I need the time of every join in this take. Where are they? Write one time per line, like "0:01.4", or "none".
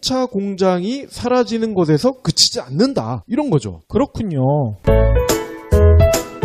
0:05.5